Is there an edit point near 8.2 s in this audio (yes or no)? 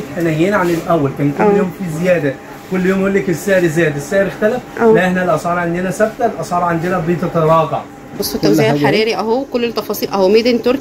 yes